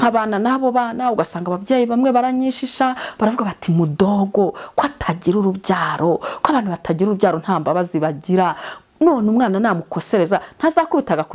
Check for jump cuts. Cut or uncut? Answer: uncut